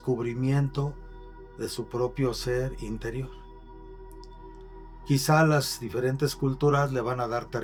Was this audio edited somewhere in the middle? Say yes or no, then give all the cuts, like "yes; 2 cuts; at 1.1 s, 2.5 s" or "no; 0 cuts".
no; 0 cuts